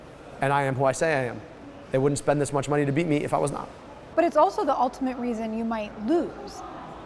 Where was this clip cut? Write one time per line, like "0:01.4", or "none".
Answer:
none